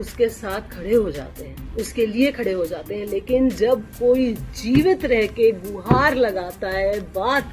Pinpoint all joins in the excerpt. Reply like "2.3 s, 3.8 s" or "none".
none